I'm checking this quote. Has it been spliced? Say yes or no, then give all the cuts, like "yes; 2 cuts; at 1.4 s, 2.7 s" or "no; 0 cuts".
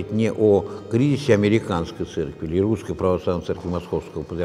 no; 0 cuts